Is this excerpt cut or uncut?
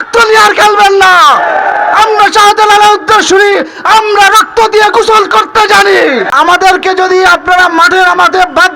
cut